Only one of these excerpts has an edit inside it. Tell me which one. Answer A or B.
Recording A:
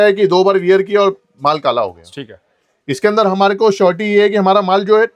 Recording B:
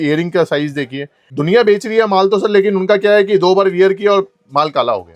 B